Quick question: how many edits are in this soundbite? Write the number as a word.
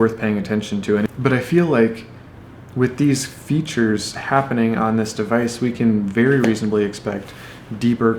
one